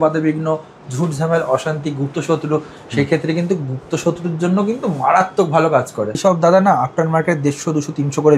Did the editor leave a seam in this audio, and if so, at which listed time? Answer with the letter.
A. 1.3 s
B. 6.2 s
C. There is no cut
B